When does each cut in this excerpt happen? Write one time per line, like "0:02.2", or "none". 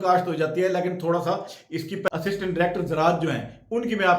0:02.1